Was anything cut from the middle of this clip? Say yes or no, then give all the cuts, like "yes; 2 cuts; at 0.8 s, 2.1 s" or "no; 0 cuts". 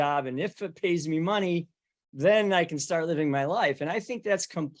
no; 0 cuts